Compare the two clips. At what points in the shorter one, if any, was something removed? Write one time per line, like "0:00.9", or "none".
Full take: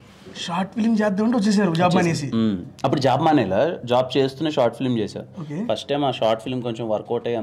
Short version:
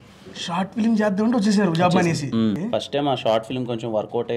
0:02.6

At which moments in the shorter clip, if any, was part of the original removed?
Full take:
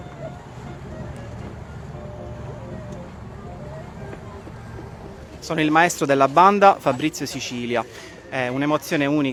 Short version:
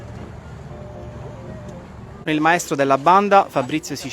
0:02.3

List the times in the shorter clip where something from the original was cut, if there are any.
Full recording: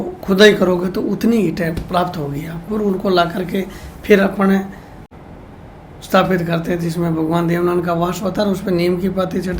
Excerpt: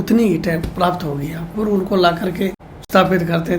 0:02.7

